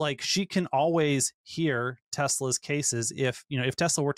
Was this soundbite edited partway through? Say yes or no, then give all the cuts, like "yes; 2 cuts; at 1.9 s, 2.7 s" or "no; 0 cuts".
no; 0 cuts